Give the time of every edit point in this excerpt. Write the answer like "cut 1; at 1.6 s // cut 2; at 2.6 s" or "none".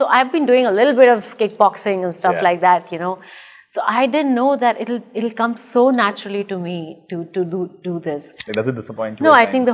cut 1; at 8.3 s